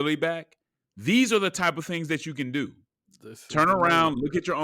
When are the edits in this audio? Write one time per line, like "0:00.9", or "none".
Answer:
none

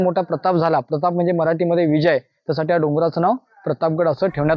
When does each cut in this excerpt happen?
none

